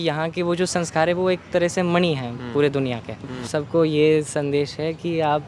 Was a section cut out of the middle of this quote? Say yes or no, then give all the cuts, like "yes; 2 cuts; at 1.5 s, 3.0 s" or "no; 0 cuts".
yes; 1 cut; at 3.4 s